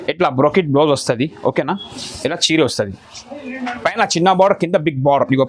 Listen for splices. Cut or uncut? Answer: uncut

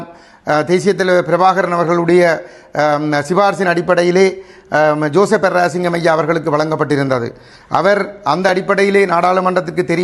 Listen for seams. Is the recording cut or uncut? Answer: uncut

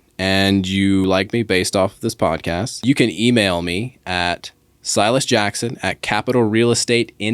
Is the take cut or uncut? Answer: cut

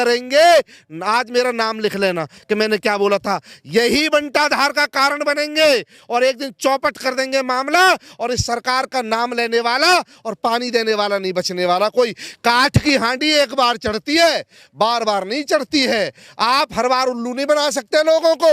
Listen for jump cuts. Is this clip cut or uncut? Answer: uncut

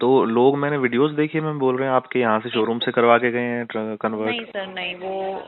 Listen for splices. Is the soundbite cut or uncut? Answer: uncut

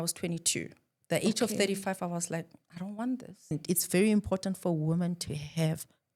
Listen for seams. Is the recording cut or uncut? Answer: cut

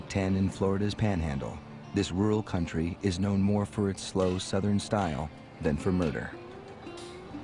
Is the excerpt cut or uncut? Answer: uncut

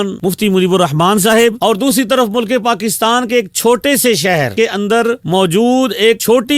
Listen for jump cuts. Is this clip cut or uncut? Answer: cut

